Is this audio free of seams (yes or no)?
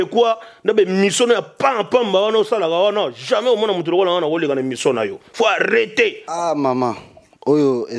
yes